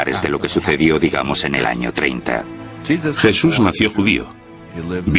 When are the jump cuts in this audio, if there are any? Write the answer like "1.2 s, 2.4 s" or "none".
2.4 s